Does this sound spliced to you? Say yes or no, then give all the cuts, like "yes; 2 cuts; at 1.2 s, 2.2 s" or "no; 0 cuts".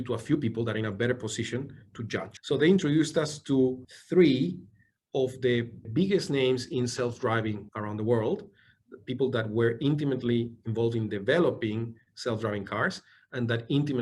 yes; 3 cuts; at 2.3 s, 3.9 s, 5.8 s